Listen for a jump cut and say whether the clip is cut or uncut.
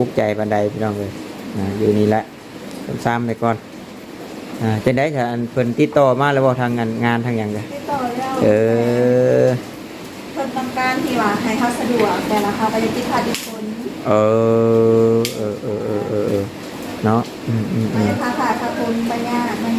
uncut